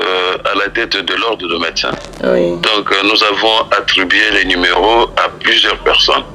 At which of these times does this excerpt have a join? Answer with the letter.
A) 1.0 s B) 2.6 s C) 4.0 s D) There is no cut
B